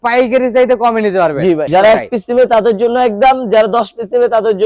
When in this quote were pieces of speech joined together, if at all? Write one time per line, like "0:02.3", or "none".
none